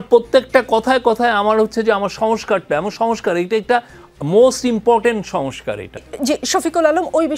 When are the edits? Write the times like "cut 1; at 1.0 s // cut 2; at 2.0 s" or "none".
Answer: cut 1; at 6.1 s